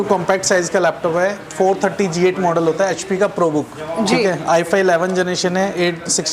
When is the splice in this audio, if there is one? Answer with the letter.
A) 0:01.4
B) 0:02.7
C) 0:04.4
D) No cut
D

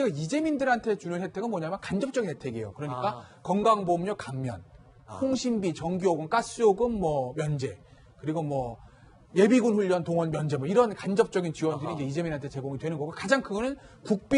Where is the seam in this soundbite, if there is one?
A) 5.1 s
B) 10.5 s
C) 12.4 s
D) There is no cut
D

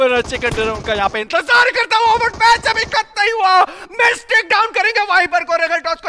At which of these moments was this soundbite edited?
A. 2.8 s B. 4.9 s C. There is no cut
C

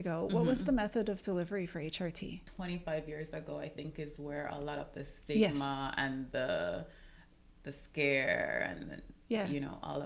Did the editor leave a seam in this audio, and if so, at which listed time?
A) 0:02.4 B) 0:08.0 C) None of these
A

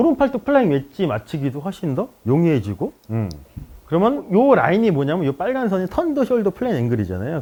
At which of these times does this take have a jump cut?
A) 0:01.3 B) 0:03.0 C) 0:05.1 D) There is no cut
D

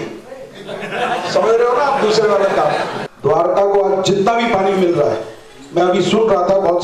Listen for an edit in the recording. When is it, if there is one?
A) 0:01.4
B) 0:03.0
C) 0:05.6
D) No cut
B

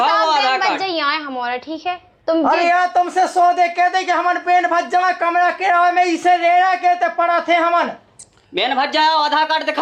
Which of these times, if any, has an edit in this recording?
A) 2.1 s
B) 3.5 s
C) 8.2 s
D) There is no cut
D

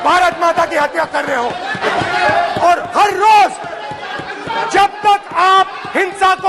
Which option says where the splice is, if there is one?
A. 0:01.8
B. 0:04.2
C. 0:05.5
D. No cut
A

